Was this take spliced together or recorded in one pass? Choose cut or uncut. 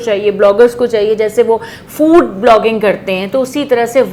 uncut